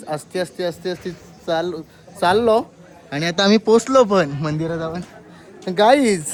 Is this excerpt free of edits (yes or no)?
yes